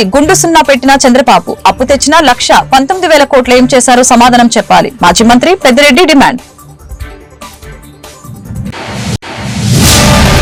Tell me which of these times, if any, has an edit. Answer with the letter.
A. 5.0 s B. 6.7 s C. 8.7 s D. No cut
D